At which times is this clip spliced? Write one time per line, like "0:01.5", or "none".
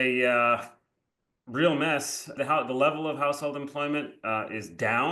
0:02.3